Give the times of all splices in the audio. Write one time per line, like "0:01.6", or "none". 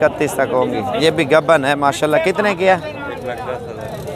0:01.0